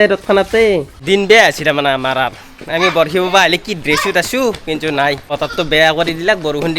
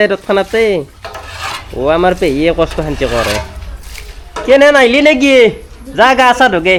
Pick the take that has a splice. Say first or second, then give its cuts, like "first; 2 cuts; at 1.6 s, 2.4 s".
first; 2 cuts; at 0.9 s, 5.3 s